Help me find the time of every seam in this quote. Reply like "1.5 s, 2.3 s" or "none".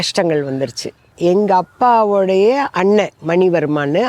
1.1 s